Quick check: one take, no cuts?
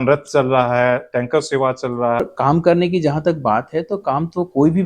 no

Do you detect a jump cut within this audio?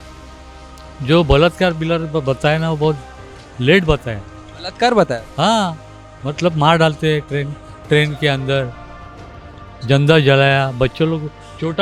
no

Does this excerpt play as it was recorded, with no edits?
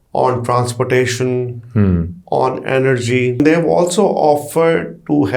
no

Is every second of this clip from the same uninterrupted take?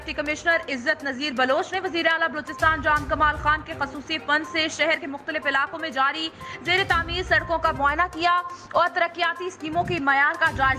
yes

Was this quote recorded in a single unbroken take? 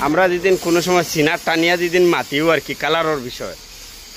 yes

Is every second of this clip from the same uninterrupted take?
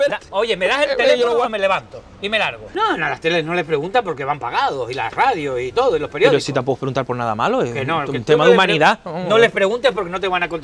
no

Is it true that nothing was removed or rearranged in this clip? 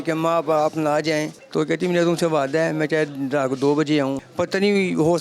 no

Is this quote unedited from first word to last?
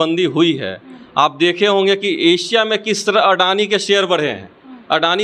yes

